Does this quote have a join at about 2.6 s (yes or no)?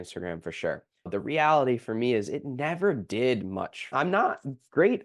no